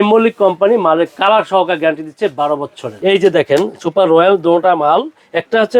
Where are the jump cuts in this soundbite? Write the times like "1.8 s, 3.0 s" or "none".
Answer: 2.9 s